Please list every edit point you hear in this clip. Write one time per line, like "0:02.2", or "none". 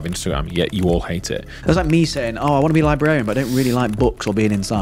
0:01.5